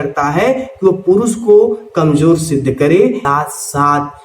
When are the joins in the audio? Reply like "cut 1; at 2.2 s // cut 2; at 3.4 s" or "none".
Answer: cut 1; at 3.2 s